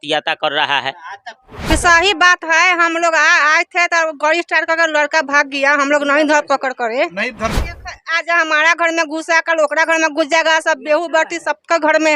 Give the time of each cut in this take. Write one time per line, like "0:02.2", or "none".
0:01.7
0:07.6